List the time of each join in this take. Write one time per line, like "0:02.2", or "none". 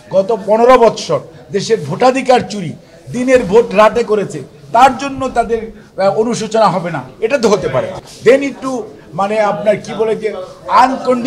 0:08.0